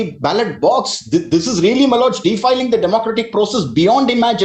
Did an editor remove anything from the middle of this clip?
no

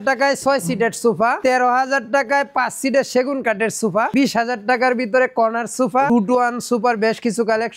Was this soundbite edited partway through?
yes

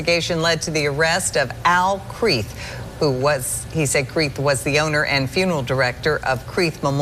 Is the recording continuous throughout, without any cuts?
yes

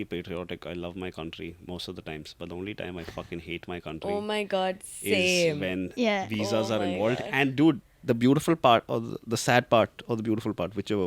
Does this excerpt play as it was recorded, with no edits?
yes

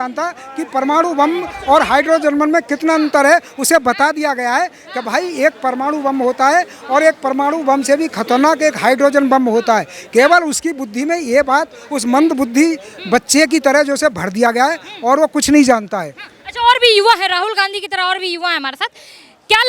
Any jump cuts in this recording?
no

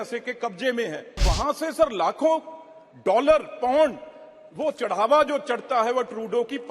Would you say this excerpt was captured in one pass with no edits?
no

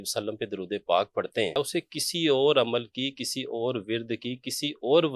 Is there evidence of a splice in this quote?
yes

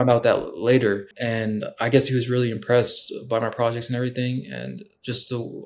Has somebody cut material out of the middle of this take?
yes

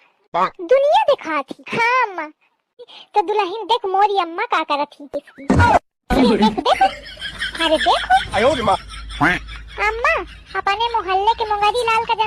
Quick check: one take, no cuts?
yes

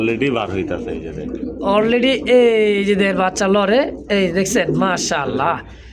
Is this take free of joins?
yes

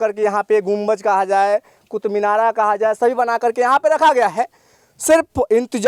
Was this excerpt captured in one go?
yes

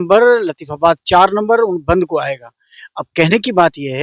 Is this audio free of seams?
yes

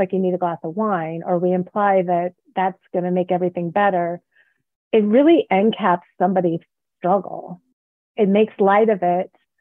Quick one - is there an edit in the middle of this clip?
yes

